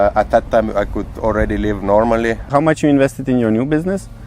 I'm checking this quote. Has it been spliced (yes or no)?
yes